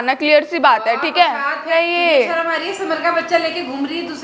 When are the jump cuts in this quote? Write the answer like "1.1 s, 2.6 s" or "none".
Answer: 1.7 s